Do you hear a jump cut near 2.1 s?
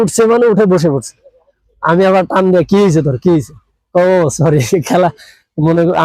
no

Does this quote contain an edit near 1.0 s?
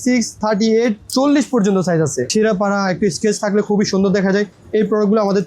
no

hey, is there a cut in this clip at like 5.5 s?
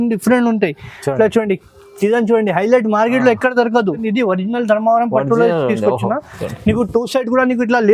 no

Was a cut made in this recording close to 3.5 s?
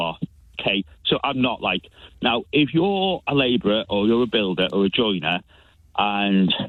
no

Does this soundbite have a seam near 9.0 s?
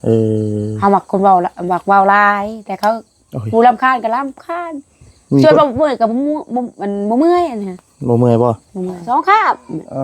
yes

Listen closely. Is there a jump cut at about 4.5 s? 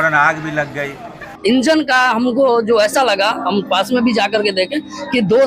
no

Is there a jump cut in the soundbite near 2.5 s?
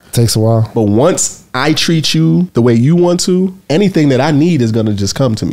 yes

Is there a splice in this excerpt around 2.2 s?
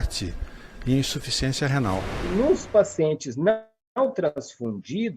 yes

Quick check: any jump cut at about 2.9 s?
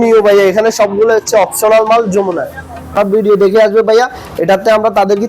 yes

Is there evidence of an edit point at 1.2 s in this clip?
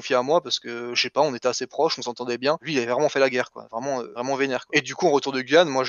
no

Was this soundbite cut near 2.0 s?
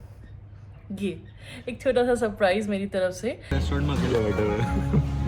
no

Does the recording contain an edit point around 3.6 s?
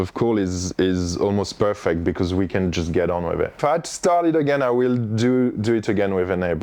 yes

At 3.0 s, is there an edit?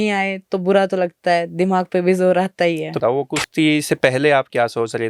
yes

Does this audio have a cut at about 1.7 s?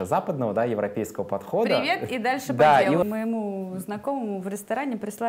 no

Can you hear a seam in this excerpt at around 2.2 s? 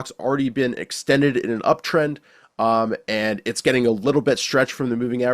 no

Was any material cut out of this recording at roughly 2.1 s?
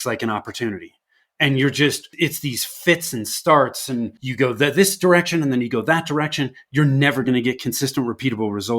yes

